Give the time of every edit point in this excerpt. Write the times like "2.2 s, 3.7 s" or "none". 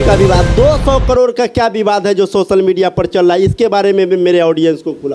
none